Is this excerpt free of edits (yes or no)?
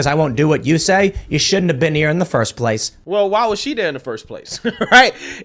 yes